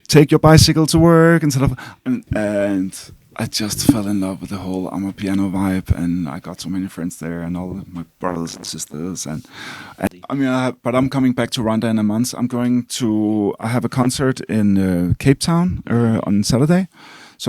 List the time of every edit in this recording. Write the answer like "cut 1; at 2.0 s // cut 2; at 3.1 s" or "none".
cut 1; at 2.3 s // cut 2; at 10.1 s